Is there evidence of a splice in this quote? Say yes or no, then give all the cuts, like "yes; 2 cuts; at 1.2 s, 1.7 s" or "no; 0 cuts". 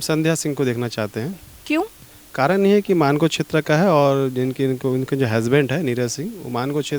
no; 0 cuts